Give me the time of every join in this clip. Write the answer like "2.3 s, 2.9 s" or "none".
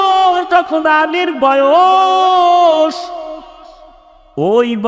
none